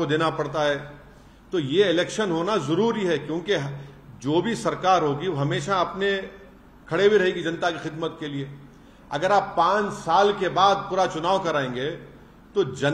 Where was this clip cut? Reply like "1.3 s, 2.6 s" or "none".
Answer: none